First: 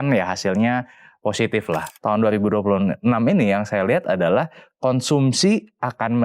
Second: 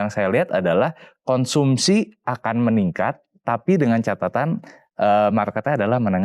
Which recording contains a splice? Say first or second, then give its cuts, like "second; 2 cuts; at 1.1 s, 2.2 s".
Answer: first; 1 cut; at 1.9 s